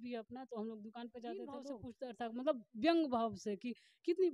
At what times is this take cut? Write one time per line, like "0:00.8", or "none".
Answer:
0:01.8

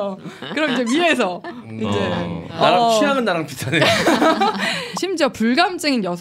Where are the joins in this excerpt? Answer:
0:02.4

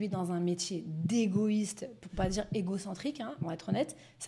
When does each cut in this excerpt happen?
none

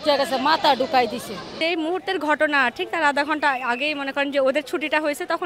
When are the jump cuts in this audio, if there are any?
0:01.6

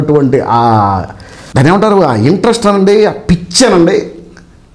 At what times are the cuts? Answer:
none

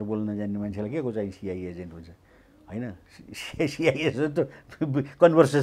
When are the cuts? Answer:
none

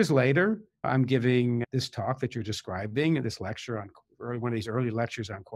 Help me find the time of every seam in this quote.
0:00.8
0:01.6

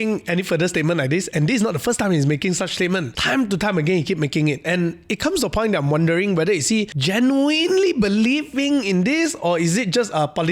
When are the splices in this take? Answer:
0:03.1
0:07.0

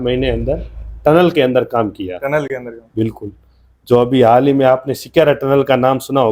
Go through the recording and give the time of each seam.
none

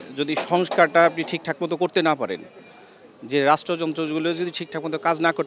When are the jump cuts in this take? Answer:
none

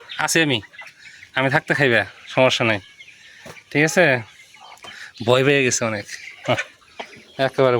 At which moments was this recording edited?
none

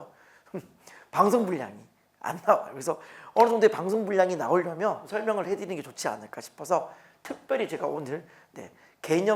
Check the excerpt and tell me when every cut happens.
0:05.1

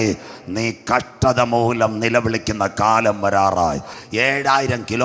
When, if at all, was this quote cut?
0:04.0

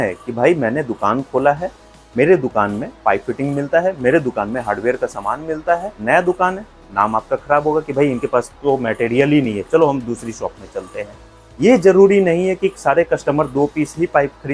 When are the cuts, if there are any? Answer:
0:05.9
0:11.4

